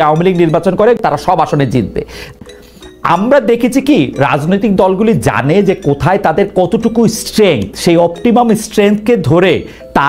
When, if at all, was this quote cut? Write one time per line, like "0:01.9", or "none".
0:01.0
0:02.4